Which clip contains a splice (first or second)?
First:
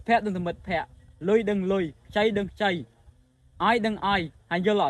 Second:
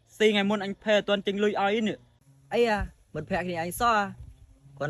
second